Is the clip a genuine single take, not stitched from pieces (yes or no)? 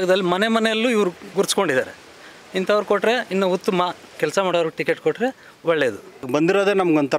no